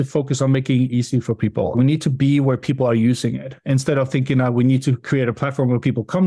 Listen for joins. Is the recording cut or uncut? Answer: uncut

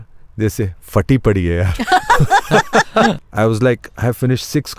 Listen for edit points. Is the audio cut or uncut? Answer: cut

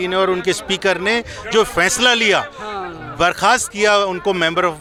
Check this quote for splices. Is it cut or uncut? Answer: uncut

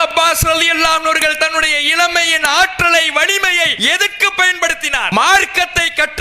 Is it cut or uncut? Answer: cut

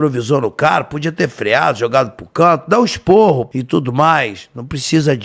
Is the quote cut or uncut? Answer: cut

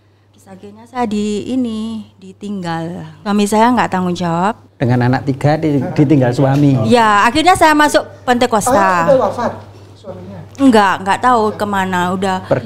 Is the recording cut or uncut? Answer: cut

